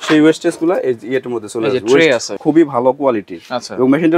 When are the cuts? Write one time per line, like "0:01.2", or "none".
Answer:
0:02.3